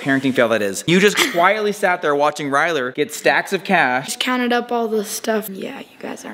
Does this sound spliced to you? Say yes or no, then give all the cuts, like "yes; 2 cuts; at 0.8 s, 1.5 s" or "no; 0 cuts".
yes; 2 cuts; at 4.1 s, 5.5 s